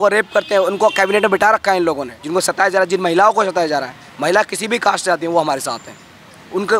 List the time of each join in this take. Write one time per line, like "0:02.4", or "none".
0:02.1